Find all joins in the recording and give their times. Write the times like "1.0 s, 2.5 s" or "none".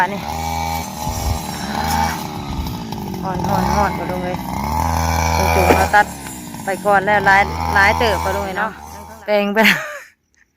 8.8 s